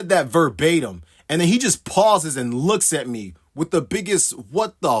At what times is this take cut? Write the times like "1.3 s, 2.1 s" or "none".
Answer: none